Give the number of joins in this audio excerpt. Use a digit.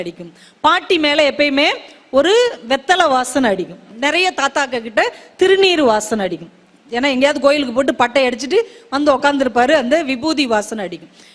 1